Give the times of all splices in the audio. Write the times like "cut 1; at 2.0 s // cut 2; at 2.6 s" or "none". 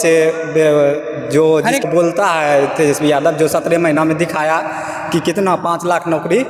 cut 1; at 1.8 s